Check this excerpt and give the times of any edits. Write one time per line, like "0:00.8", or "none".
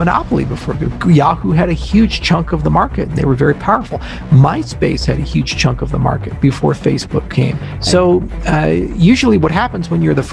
0:07.7